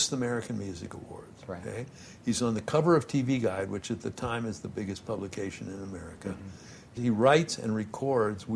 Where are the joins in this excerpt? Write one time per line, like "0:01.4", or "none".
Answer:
0:06.9